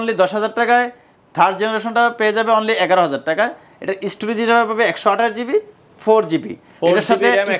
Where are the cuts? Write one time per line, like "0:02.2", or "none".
none